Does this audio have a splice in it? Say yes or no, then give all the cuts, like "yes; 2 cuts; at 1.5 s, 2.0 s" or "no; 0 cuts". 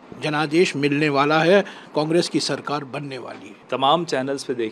no; 0 cuts